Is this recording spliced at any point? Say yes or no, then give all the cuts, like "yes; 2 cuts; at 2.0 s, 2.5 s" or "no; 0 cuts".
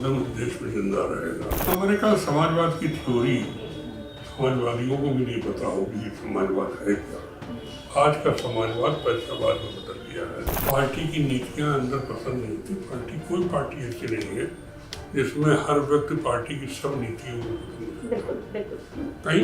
yes; 2 cuts; at 1.6 s, 10.5 s